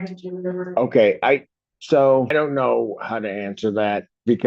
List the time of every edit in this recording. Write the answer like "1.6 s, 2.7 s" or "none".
2.3 s